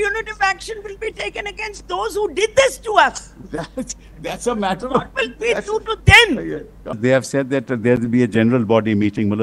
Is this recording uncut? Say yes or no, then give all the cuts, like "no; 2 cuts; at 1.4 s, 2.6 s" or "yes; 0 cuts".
no; 1 cut; at 7.0 s